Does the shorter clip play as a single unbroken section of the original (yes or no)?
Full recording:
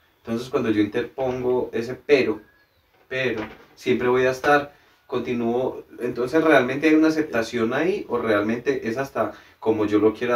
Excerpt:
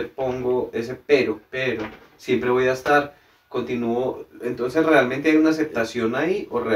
no